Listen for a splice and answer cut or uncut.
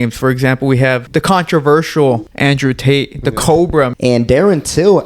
cut